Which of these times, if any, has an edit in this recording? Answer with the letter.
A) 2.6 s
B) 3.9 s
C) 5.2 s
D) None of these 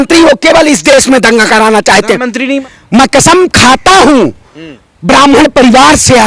A